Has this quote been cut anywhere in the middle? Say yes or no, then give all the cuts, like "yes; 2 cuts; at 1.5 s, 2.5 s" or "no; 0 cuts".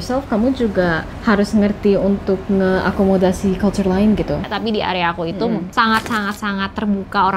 yes; 1 cut; at 4.4 s